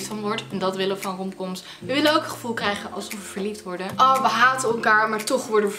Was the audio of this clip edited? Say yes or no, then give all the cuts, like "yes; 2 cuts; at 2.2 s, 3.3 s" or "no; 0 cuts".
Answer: yes; 1 cut; at 3.9 s